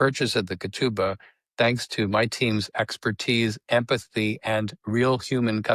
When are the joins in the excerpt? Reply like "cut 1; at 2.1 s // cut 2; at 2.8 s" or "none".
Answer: none

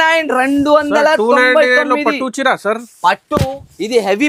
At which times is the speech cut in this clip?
none

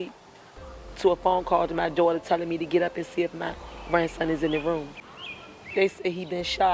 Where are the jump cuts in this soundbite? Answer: cut 1; at 4.9 s

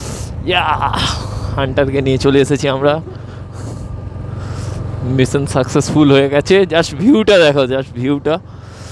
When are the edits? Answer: none

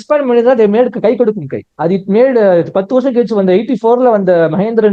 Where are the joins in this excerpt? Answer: none

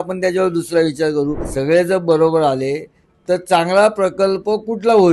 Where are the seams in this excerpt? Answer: cut 1; at 1.4 s

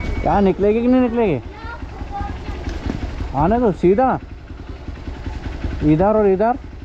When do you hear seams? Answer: none

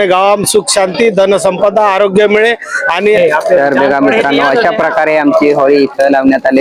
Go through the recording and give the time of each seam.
cut 1; at 3.2 s

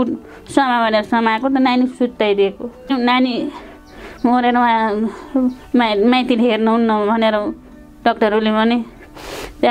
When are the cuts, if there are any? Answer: cut 1; at 2.9 s

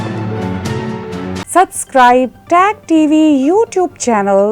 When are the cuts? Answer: cut 1; at 1.3 s

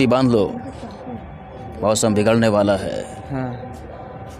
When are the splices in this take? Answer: none

